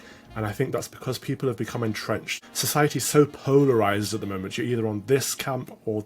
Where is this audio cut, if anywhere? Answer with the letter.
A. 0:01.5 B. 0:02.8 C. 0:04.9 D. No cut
B